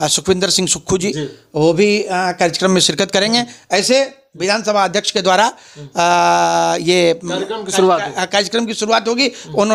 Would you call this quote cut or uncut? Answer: uncut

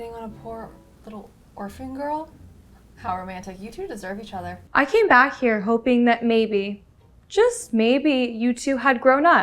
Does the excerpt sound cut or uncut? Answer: cut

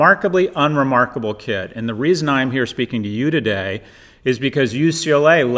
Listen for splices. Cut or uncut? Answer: uncut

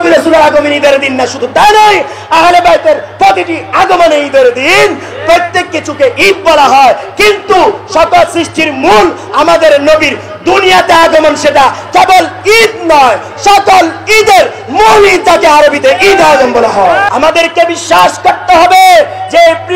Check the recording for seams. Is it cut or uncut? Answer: cut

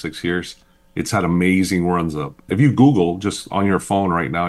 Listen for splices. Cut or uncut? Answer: cut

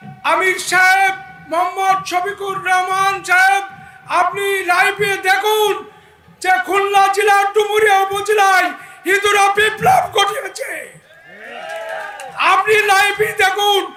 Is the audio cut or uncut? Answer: uncut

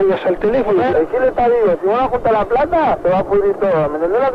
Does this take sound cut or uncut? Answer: cut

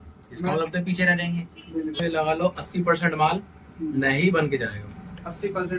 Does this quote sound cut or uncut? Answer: cut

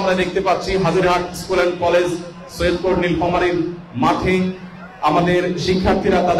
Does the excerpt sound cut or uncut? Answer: uncut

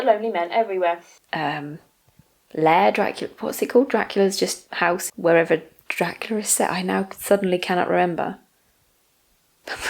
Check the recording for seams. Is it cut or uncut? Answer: cut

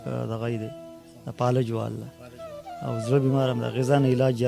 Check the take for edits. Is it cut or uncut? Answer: uncut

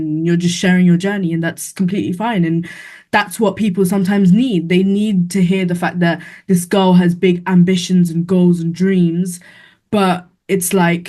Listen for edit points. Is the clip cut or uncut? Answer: uncut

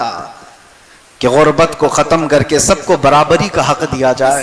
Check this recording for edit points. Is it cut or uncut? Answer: uncut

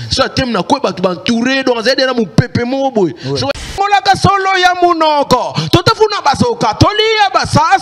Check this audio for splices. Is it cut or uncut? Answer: cut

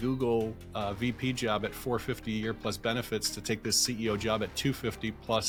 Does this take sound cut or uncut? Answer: uncut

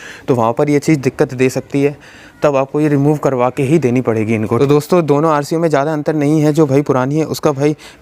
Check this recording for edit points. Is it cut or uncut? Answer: cut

